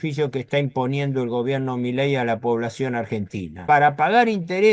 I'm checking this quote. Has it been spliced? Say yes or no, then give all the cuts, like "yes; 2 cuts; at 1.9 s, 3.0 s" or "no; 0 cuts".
yes; 1 cut; at 3.6 s